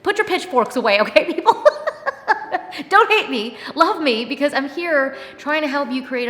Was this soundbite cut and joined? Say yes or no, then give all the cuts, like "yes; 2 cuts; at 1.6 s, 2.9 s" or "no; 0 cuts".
no; 0 cuts